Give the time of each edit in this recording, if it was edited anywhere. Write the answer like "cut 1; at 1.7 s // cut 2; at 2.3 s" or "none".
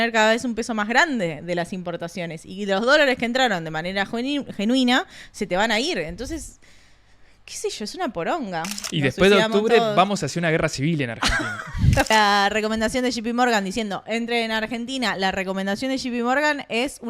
cut 1; at 8.9 s // cut 2; at 12.1 s